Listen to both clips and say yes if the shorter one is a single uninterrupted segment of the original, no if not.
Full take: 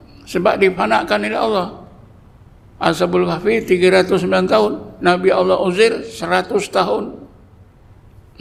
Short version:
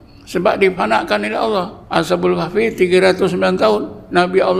no